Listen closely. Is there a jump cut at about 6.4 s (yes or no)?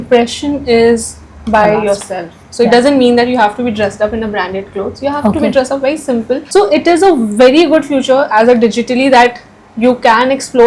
yes